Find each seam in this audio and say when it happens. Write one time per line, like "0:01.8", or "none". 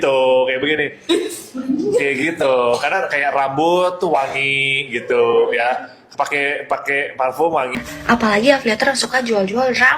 0:07.7